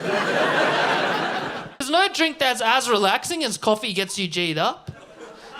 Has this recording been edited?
yes; 1 cut; at 1.7 s

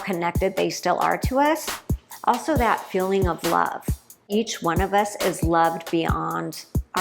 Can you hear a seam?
yes; 1 cut; at 4.3 s

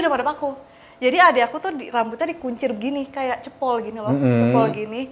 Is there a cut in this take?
no; 0 cuts

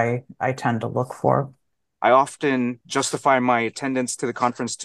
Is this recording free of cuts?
no; 1 cut; at 1.8 s

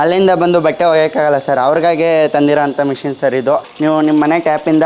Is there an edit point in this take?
yes; 1 cut; at 3.7 s

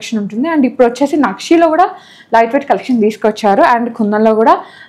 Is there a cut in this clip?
no; 0 cuts

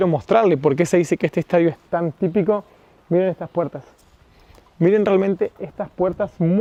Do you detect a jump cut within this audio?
no; 0 cuts

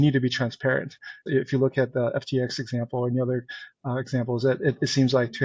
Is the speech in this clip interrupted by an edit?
yes; 1 cut; at 1.2 s

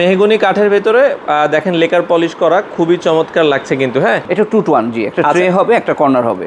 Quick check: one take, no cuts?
no; 1 cut; at 4.3 s

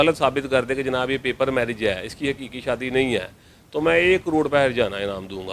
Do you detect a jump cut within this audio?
no; 0 cuts

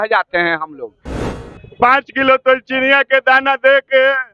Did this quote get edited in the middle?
yes; 1 cut; at 1.2 s

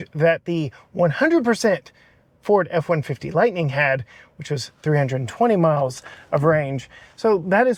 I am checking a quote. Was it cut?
no; 0 cuts

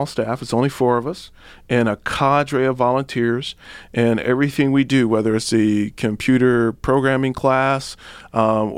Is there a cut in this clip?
no; 0 cuts

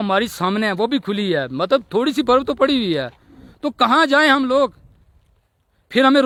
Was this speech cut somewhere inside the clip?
no; 0 cuts

